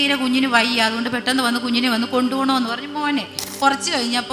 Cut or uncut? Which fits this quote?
cut